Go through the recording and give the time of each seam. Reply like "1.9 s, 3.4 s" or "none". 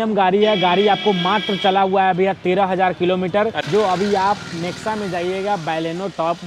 3.6 s